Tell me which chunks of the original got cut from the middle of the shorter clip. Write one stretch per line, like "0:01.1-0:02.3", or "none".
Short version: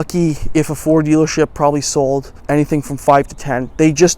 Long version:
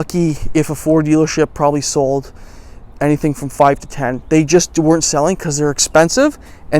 0:02.3-0:02.9